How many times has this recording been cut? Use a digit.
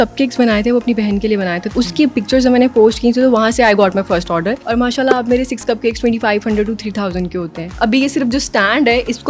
3